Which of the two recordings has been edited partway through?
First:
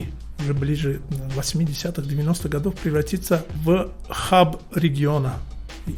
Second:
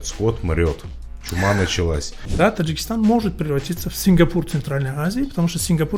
second; 1 cut; at 2.2 s

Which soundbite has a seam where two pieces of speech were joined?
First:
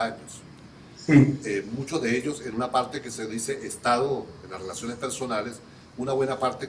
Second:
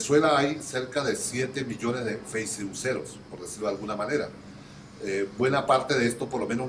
second; 1 cut; at 1.6 s

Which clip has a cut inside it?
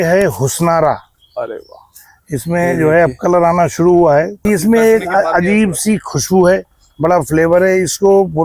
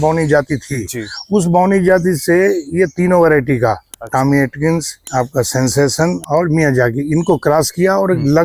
second; 2 cuts; at 5.0 s, 6.2 s

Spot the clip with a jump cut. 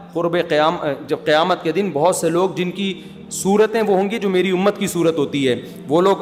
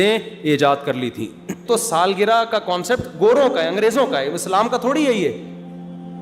second; 1 cut; at 1.6 s

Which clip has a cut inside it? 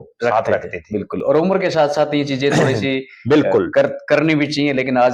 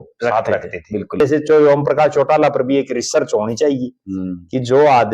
second; 1 cut; at 1.2 s

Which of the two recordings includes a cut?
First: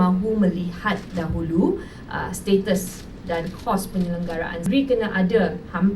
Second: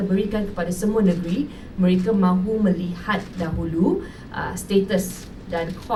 first; 1 cut; at 4.7 s

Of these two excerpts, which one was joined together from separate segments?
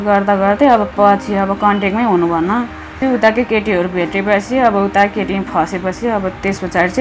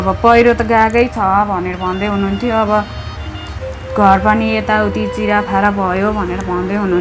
first; 1 cut; at 2.9 s

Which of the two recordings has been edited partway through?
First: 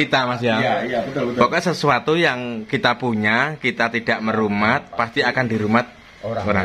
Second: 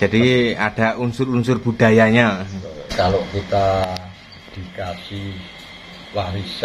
second; 1 cut; at 2.9 s

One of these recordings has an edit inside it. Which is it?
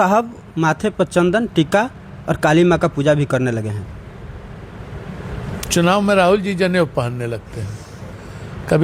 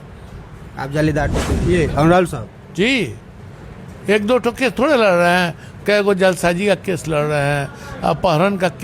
second; 1 cut; at 1.4 s

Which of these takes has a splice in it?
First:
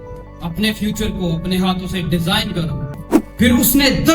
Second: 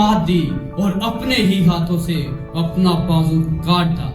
first; 1 cut; at 3.0 s

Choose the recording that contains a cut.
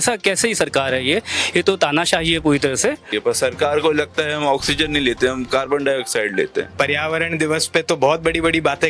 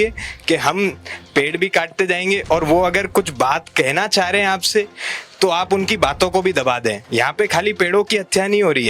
first; 2 cuts; at 3.1 s, 6.7 s

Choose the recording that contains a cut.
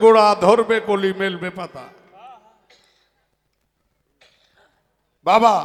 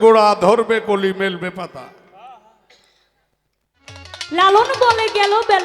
second; 1 cut; at 4.1 s

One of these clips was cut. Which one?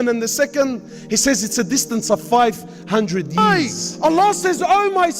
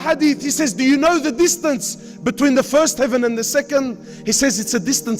first; 1 cut; at 3.6 s

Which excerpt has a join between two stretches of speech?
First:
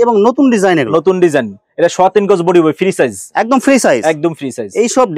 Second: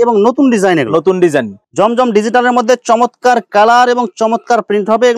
second; 1 cut; at 1.6 s

